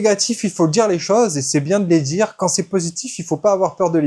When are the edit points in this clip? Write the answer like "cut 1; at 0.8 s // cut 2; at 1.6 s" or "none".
none